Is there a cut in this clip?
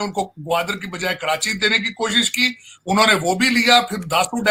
no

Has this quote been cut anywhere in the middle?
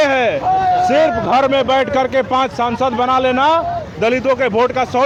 no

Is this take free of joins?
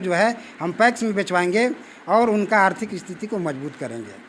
yes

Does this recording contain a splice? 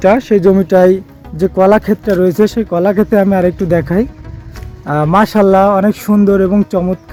no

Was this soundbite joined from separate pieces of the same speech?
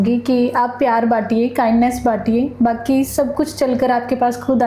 no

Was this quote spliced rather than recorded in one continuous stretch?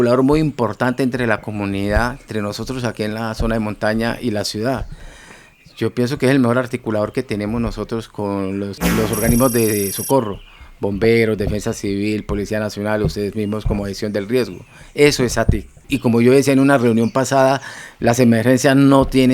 yes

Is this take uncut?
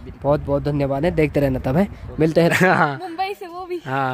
no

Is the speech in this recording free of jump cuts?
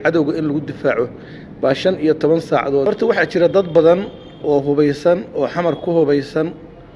no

